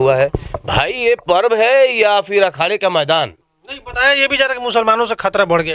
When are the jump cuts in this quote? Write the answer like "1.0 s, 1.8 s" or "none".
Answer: none